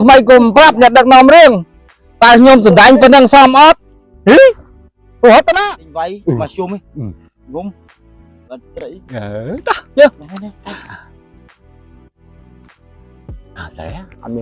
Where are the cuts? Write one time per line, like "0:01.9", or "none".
0:05.6